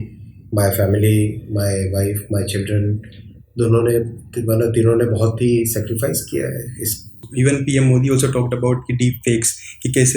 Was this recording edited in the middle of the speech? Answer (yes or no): yes